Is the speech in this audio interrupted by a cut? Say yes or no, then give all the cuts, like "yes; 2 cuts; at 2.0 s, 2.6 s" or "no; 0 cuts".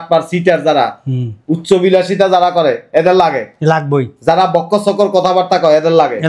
no; 0 cuts